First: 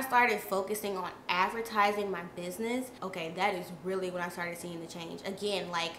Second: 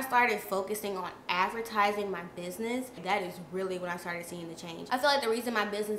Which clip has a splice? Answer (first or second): second